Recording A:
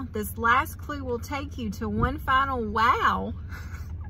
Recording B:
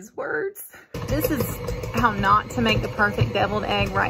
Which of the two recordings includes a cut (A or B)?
B